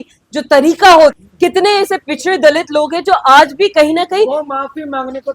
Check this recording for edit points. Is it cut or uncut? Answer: cut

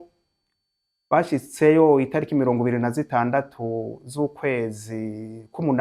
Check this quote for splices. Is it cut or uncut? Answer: uncut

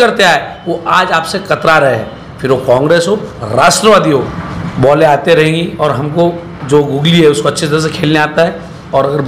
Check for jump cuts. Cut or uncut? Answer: cut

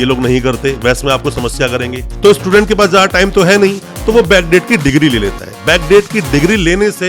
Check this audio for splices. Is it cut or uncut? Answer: cut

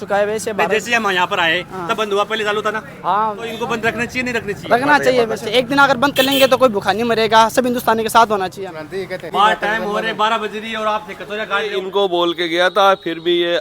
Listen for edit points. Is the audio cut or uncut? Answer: cut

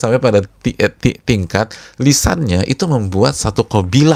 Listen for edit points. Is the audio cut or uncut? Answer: uncut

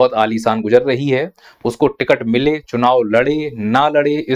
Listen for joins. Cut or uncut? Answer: uncut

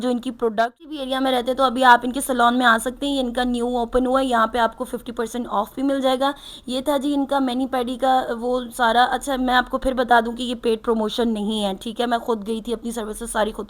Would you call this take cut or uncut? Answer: cut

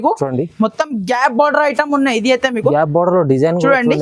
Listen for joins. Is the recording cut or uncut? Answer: uncut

